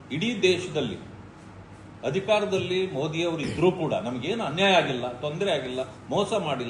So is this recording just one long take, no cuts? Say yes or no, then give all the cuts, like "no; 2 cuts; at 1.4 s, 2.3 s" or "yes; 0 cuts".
yes; 0 cuts